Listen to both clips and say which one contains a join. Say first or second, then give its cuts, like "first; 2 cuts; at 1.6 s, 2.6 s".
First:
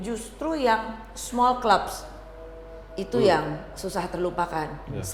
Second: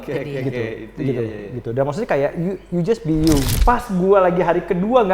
second; 1 cut; at 3.5 s